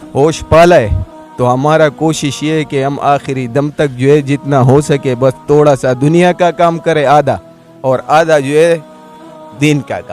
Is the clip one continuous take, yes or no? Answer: yes